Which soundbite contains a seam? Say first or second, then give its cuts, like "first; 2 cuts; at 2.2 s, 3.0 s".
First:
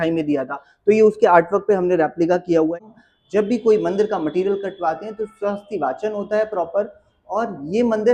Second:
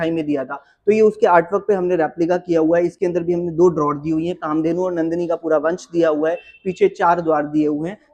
first; 1 cut; at 2.7 s